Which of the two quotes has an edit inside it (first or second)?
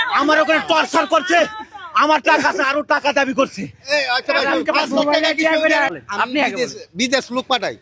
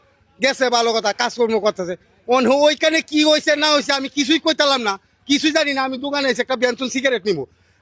first